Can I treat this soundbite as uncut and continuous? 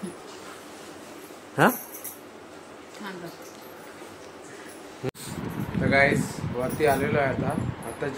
no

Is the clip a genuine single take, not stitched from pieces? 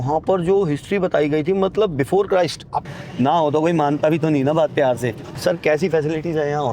no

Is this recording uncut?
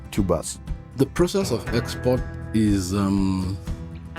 no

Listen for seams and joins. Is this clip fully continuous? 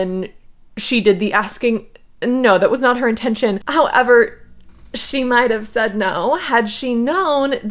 no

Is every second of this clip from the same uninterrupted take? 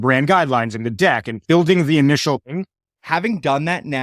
no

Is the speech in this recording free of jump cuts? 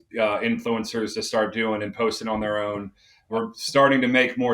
no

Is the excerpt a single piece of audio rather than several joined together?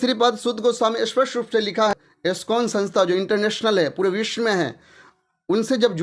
no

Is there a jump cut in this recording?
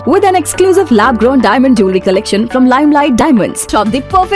no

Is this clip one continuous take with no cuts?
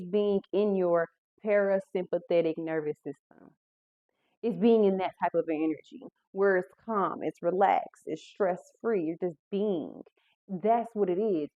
yes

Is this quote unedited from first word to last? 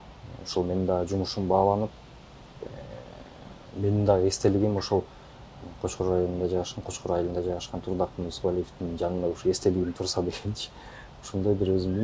yes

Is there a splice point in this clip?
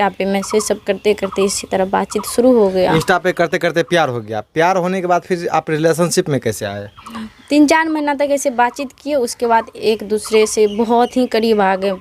no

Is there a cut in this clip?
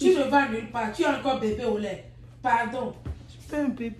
no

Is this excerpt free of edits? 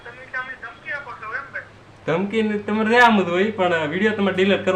yes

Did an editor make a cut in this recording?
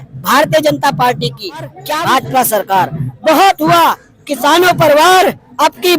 yes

